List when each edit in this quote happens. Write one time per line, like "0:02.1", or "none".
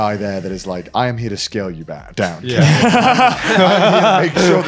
none